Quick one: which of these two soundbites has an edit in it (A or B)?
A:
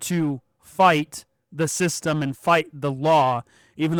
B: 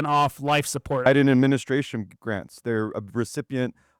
B